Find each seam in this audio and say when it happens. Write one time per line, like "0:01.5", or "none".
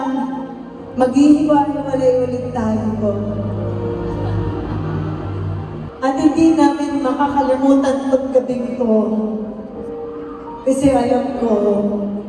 0:05.9